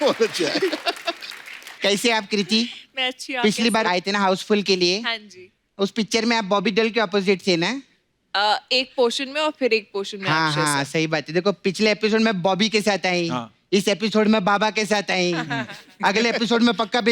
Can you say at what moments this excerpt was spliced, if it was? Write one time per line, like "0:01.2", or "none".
none